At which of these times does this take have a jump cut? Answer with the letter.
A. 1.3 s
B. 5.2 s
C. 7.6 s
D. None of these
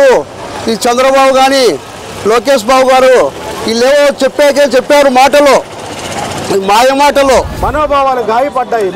C